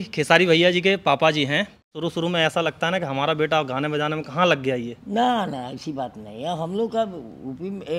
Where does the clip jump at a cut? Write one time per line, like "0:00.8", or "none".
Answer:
0:01.9